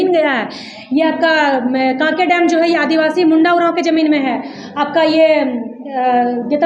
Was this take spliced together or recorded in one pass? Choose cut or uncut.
uncut